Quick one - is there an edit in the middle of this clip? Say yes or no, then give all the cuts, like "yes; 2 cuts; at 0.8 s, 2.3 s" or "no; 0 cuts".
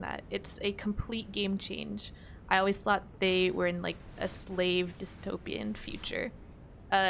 no; 0 cuts